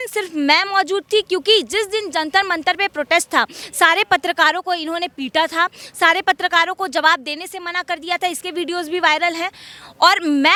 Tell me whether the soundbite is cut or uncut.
uncut